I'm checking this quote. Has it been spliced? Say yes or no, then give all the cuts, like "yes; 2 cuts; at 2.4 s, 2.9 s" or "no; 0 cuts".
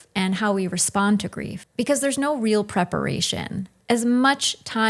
yes; 1 cut; at 1.6 s